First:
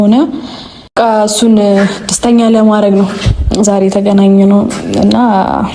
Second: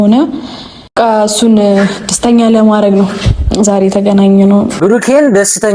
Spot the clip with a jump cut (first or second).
second